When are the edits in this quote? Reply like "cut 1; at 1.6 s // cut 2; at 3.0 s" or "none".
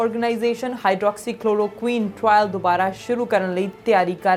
none